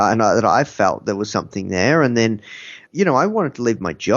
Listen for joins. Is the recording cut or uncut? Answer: cut